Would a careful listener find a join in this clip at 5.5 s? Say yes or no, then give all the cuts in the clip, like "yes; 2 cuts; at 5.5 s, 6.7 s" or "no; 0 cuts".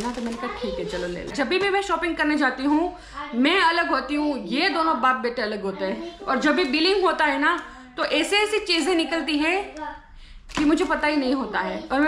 no; 1 cut; at 1.3 s